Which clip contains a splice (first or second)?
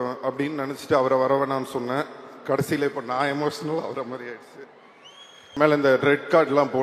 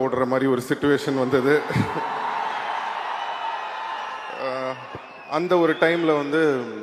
first